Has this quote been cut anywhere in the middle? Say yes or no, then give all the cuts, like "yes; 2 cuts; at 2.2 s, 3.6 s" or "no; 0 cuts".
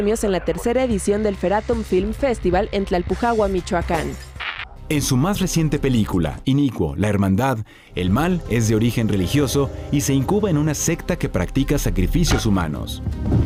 no; 0 cuts